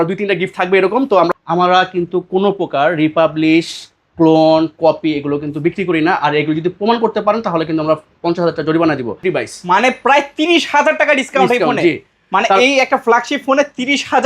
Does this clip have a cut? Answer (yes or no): yes